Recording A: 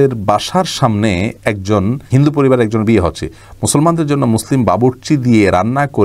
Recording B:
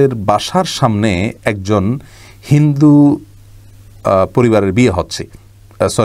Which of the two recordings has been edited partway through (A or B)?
A